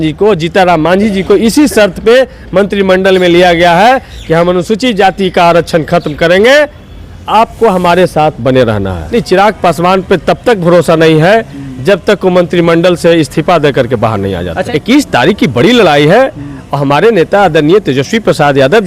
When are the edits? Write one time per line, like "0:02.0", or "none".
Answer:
0:08.9
0:14.5